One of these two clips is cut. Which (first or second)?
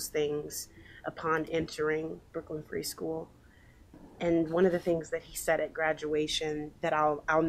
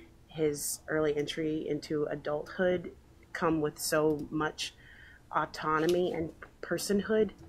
first